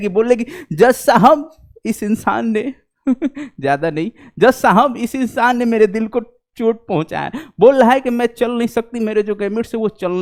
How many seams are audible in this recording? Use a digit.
0